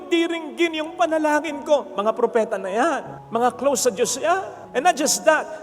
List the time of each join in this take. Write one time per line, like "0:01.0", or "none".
none

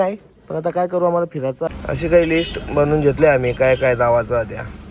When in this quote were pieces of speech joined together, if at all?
0:01.7

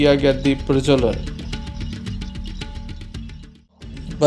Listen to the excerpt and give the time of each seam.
none

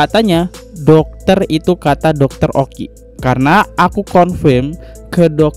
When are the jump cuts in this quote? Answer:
none

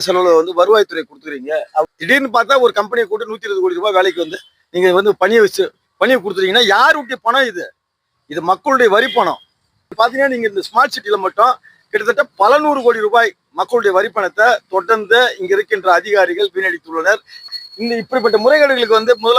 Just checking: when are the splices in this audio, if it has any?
0:01.9
0:09.9
0:17.6

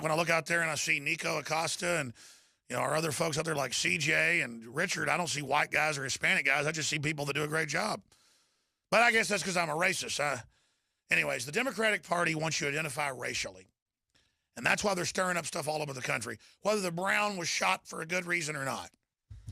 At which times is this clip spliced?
0:03.6

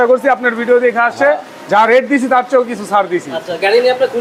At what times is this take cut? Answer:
none

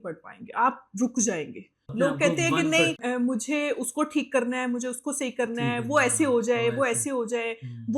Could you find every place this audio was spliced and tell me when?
0:01.8
0:03.0

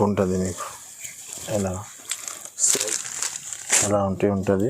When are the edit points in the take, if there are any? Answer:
0:02.7

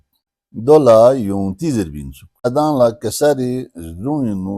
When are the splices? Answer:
0:02.5

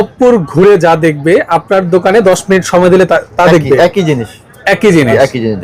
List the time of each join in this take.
none

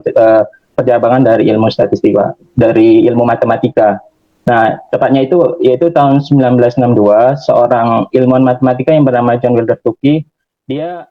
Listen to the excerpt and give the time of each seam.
none

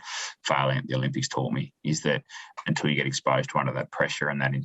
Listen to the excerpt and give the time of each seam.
0:02.5

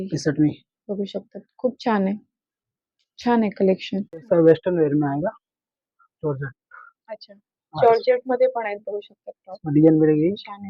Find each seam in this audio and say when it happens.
none

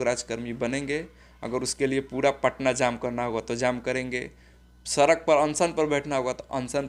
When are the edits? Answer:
none

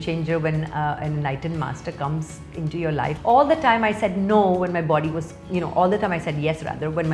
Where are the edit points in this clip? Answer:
0:03.2

